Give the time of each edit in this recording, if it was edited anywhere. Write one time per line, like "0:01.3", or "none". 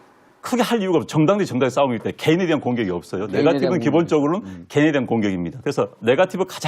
0:01.7